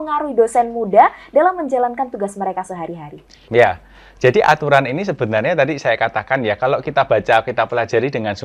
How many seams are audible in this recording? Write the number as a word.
zero